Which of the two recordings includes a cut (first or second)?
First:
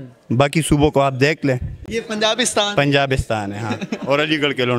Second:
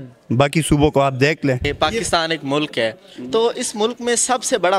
second